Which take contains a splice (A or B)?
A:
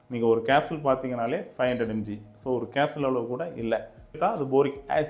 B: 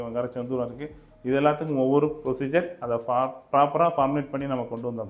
A